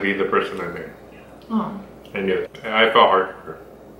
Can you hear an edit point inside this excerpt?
yes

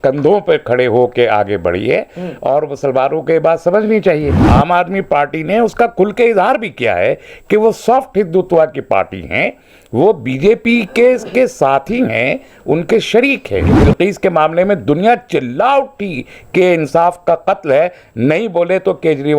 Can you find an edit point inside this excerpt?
yes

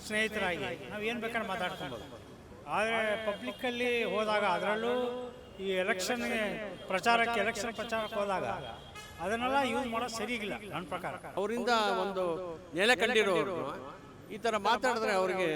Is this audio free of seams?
no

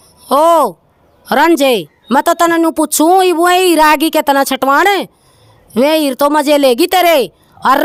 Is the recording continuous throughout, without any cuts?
yes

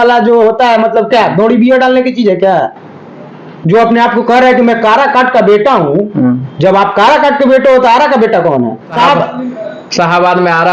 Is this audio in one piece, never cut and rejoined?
no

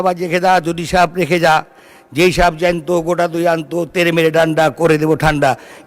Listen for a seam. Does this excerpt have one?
no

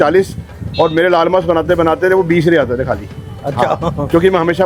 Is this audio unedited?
yes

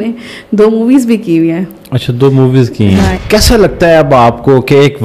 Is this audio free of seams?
no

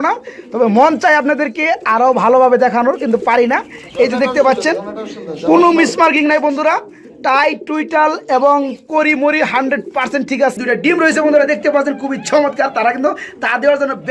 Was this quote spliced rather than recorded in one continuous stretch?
yes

